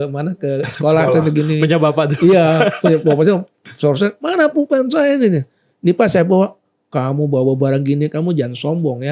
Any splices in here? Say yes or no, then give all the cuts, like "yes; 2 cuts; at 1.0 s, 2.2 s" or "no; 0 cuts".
no; 0 cuts